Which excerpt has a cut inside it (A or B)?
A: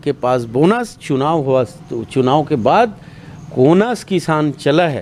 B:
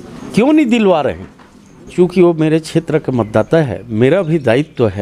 B